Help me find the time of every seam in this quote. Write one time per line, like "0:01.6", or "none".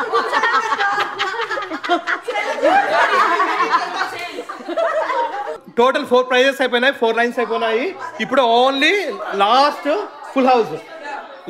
0:05.6